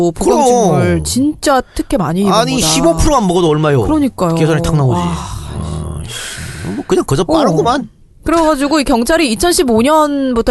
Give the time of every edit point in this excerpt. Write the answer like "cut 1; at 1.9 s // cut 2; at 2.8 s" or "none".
none